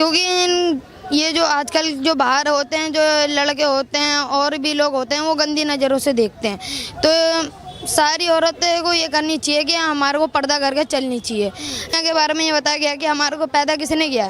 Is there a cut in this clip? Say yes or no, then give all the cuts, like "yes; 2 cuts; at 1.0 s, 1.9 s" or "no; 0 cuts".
yes; 1 cut; at 11.9 s